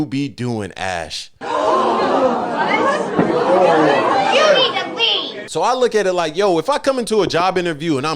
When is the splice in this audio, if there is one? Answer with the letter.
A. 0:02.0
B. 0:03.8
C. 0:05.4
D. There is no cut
C